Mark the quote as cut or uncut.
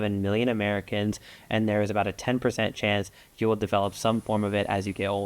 uncut